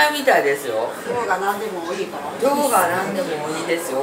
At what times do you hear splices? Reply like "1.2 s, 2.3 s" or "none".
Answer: 1.0 s